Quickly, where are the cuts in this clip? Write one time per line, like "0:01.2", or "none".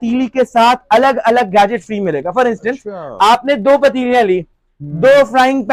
none